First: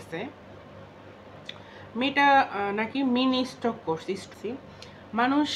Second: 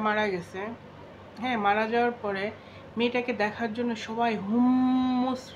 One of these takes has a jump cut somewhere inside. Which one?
first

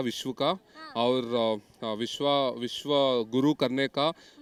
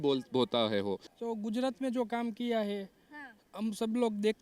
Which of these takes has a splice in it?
second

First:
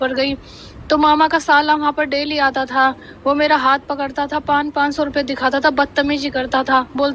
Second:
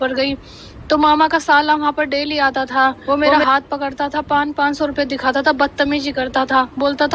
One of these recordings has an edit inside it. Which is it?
second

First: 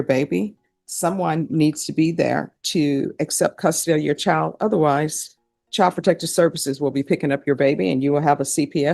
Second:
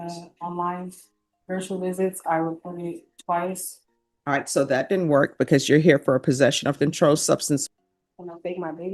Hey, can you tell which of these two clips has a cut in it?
second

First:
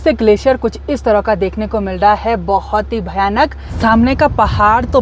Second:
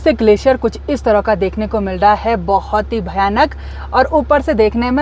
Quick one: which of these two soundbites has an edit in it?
first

